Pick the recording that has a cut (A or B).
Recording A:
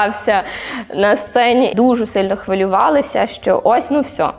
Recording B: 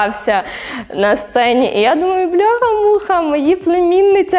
A